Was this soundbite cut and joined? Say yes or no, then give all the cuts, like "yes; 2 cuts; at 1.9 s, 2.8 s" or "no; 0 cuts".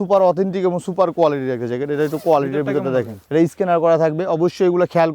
no; 0 cuts